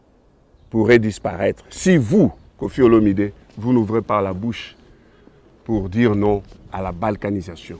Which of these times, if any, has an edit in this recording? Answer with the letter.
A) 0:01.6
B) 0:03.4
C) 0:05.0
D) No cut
D